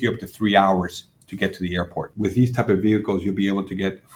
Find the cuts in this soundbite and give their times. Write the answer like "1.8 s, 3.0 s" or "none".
2.1 s